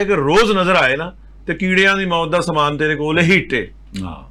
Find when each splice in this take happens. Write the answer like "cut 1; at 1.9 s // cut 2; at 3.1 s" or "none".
none